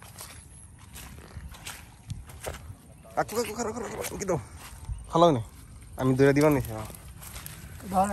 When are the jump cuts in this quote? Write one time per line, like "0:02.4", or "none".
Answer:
none